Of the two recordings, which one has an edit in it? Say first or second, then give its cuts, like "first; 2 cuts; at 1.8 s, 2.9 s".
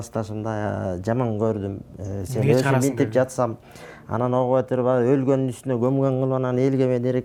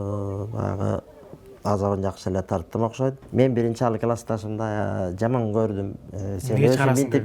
second; 1 cut; at 3.2 s